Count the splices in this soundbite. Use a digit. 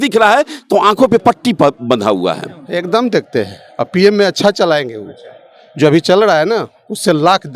1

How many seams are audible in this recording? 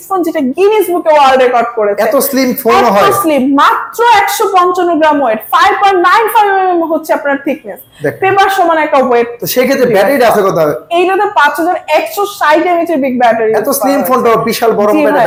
0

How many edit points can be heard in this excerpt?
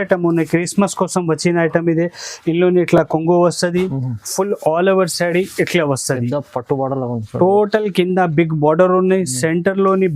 0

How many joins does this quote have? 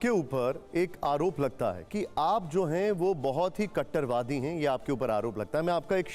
1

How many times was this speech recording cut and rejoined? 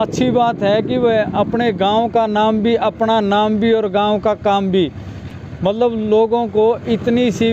0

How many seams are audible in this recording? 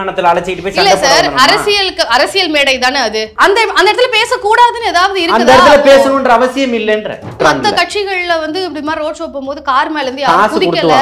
2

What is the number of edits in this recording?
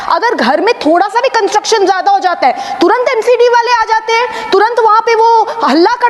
0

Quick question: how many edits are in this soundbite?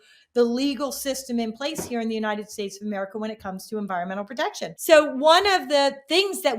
1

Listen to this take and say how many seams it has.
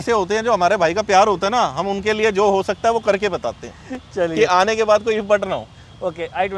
0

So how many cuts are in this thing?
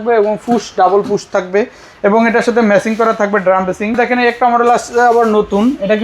1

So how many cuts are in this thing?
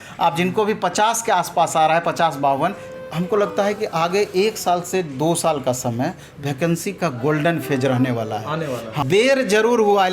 2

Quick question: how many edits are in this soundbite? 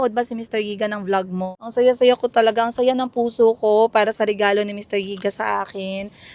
1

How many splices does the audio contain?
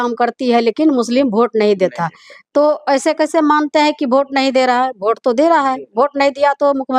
0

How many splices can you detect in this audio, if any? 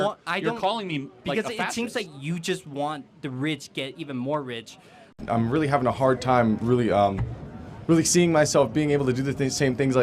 1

